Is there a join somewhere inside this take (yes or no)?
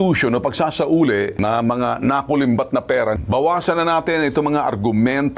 yes